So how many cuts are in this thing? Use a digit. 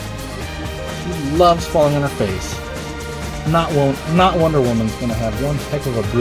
1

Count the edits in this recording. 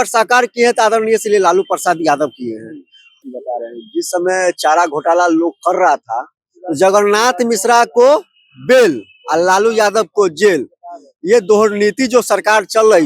1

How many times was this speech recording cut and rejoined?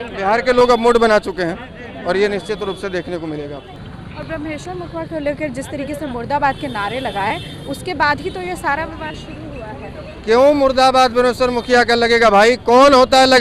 0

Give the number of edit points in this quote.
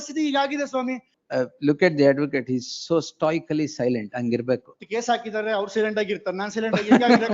1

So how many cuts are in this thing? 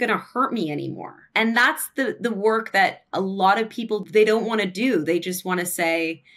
2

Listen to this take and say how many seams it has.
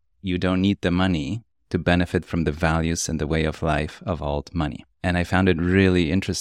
1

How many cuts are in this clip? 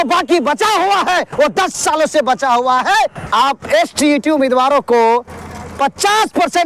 1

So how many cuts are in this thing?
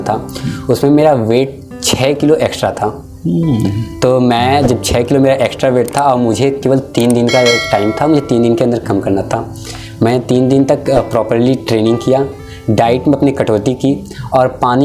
0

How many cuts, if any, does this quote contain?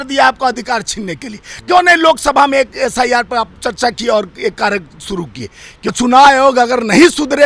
1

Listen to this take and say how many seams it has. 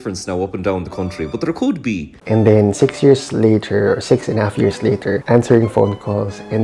1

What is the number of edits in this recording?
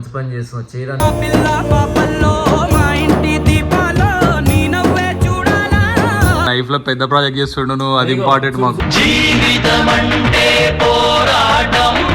1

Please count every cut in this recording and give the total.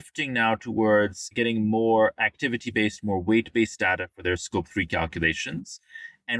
1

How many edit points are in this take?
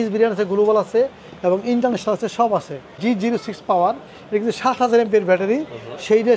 1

